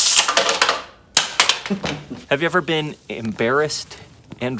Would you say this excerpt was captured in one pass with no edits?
no; 1 cut; at 2.2 s

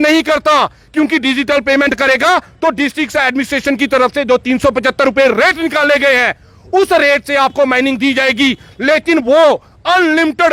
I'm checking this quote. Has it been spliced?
no; 0 cuts

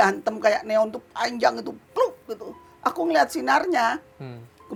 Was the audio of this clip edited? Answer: no; 0 cuts

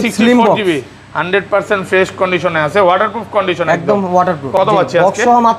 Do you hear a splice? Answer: yes; 1 cut; at 4.5 s

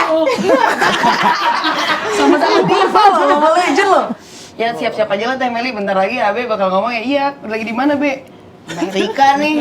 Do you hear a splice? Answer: yes; 1 cut; at 4.2 s

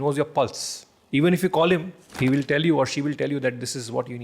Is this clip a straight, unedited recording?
no; 1 cut; at 2.0 s

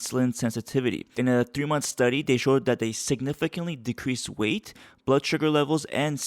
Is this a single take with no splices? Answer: no; 1 cut; at 1.1 s

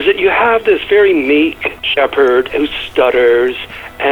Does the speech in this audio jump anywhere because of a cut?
yes; 2 cuts; at 1.8 s, 2.5 s

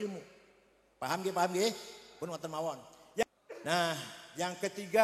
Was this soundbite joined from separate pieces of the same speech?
yes; 1 cut; at 3.2 s

